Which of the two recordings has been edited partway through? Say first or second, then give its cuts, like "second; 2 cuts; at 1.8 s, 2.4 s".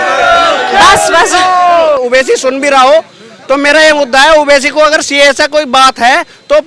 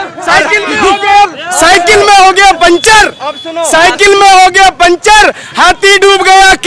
first; 1 cut; at 2.0 s